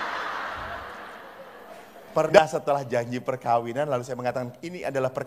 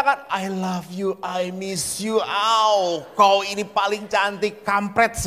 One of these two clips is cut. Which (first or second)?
first